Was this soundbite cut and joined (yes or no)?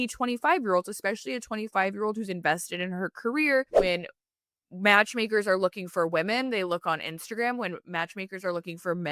yes